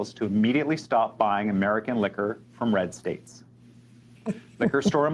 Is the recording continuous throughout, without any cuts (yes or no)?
yes